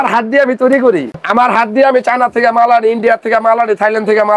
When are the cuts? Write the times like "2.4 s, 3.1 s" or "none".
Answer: 1.2 s

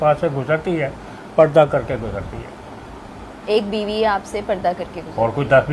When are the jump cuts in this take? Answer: none

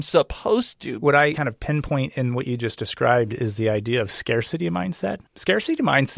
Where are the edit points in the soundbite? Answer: 1.3 s, 5.3 s

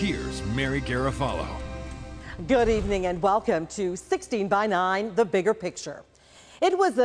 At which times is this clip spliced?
2.8 s

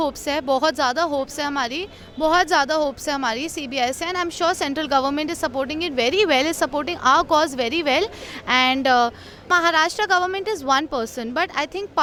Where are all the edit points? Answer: none

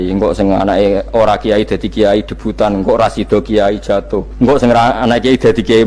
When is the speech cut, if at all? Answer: 4.3 s

